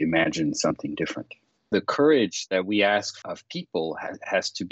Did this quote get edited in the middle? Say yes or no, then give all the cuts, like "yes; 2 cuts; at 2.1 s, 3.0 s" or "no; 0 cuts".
yes; 2 cuts; at 1.7 s, 3.2 s